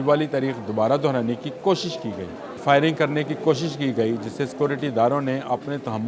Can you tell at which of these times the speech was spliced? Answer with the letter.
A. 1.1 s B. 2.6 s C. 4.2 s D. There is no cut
B